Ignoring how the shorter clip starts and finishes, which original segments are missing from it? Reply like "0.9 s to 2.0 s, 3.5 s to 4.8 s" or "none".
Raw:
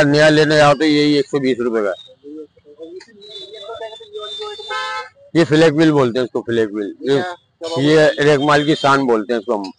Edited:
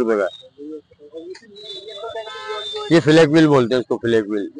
4.5 s to 5.3 s